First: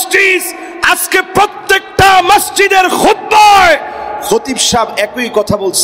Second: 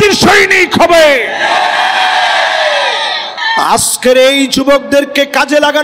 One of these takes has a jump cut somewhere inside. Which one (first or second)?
second